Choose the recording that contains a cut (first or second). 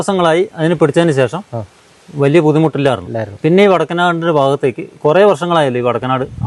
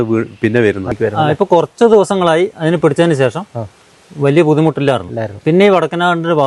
second